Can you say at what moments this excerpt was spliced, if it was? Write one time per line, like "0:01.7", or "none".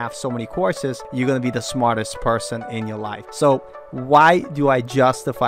0:01.0
0:03.2